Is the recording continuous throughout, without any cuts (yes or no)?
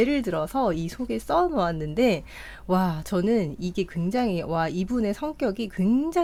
yes